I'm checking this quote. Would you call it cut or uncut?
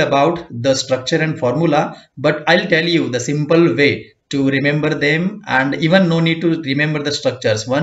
uncut